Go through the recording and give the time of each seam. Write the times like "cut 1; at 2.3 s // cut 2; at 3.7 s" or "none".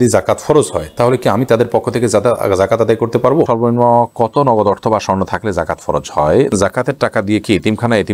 cut 1; at 3.5 s // cut 2; at 6.5 s